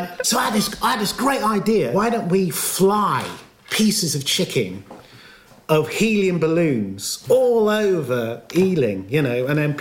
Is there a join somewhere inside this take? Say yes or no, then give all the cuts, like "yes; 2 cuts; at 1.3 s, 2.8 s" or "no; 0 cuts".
yes; 1 cut; at 1.9 s